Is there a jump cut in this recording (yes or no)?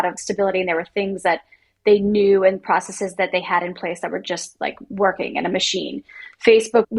no